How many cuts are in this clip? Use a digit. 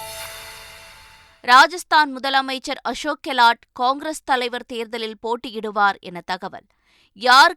0